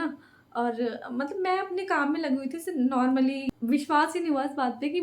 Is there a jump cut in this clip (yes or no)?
yes